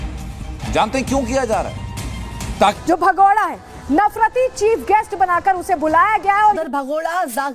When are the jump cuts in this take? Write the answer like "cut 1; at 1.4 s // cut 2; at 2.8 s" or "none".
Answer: cut 1; at 2.8 s // cut 2; at 6.6 s